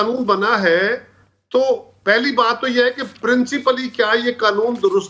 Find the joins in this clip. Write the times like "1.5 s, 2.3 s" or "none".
none